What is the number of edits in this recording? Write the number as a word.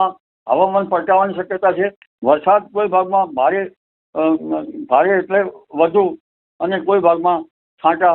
one